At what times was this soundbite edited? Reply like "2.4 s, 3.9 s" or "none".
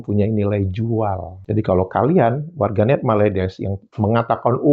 1.3 s